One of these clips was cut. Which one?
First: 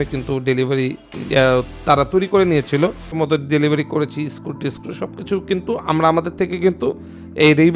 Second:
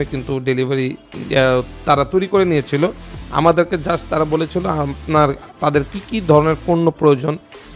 first; 1 cut; at 3.1 s

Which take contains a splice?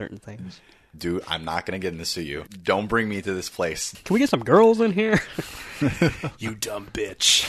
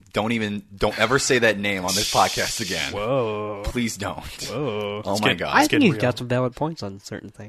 first; 2 cuts; at 2.5 s, 3.8 s

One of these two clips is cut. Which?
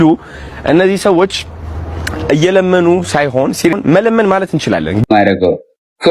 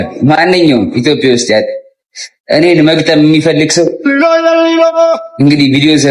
first; 2 cuts; at 3.7 s, 5.0 s

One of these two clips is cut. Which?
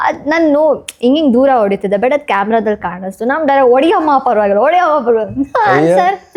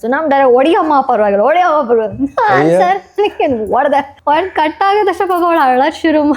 second; 1 cut; at 4.1 s

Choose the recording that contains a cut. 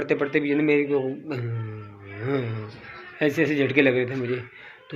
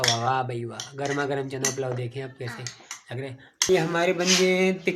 second; 1 cut; at 3.7 s

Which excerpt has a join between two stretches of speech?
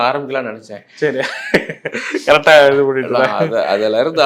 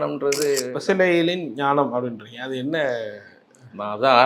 second; 1 cut; at 0.9 s

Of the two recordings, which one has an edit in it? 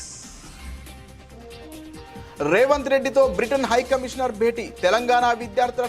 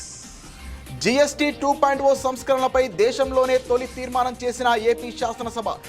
second; 1 cut; at 0.9 s

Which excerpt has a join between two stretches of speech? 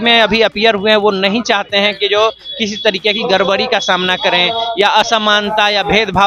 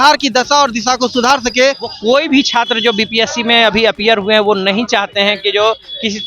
second; 1 cut; at 1.9 s

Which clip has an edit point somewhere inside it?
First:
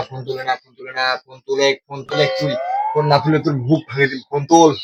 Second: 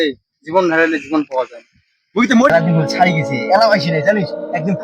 second; 1 cut; at 2.5 s

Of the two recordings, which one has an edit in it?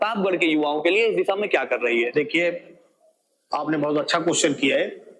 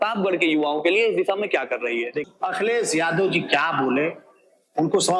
second; 1 cut; at 2.2 s

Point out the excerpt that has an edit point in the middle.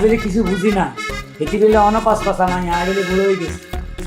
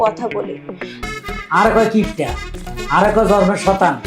second; 1 cut; at 0.9 s

